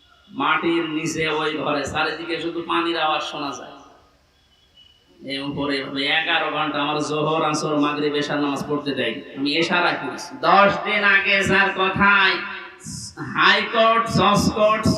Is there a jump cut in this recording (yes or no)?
yes